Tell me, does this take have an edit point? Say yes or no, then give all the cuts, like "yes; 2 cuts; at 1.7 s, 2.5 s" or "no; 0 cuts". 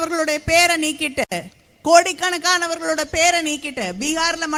no; 0 cuts